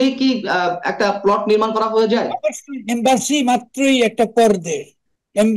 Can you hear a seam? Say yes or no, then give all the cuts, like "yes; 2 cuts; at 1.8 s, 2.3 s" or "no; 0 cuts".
no; 0 cuts